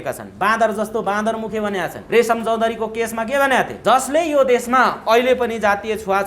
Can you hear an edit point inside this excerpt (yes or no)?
yes